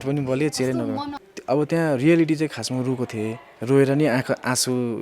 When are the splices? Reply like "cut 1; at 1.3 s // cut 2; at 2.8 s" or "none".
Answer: cut 1; at 1.1 s